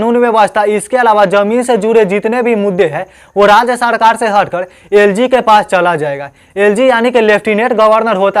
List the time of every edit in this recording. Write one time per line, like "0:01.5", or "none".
none